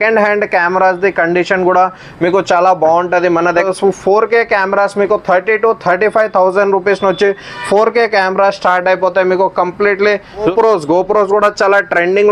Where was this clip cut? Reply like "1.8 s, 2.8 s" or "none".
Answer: 3.7 s, 10.5 s